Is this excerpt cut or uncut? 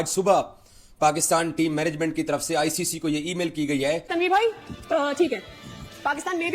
cut